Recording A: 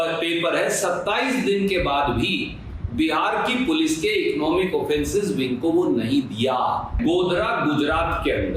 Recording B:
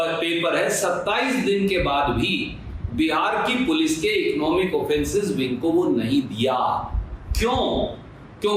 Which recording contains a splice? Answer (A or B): A